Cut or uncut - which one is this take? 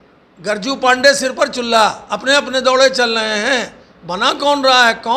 uncut